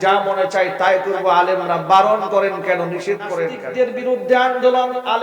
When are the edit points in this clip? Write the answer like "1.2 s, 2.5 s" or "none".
3.6 s